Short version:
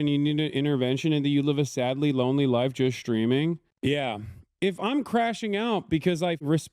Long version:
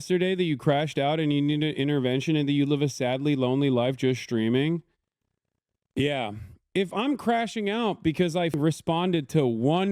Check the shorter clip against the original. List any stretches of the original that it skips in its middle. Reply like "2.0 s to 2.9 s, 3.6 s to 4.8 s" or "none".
4.9 s to 5.8 s